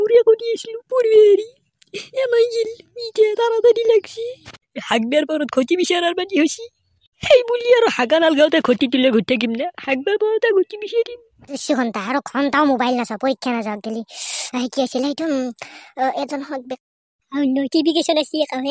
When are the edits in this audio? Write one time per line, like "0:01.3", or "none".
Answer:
0:11.7
0:16.8